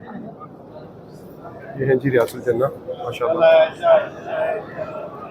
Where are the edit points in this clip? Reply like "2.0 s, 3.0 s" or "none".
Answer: 1.6 s